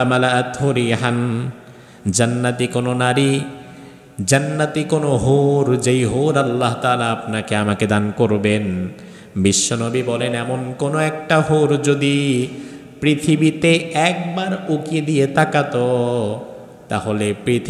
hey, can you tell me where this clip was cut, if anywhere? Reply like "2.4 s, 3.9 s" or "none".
none